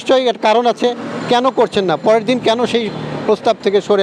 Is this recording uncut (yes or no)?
yes